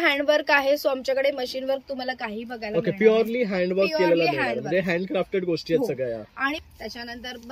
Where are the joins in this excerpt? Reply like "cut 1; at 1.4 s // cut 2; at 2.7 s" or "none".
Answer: cut 1; at 6.6 s